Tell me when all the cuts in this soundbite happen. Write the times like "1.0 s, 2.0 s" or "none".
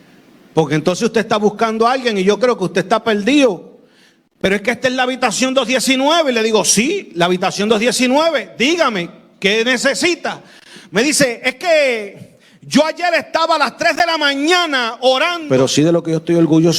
15.4 s